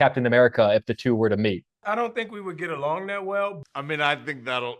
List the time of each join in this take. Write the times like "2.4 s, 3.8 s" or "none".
1.8 s, 3.6 s